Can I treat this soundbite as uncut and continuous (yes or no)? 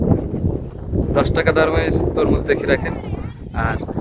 yes